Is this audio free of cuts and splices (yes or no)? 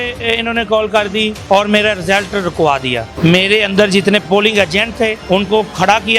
no